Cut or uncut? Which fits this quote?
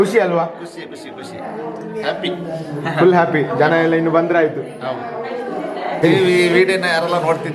uncut